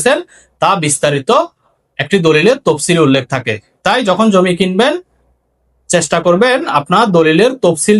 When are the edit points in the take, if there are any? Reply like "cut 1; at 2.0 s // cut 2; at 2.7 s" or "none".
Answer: none